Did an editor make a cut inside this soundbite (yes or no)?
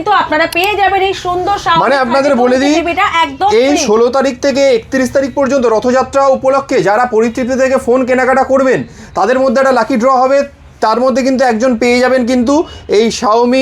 no